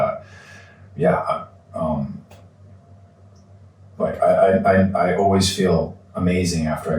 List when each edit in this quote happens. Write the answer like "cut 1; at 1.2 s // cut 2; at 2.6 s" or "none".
none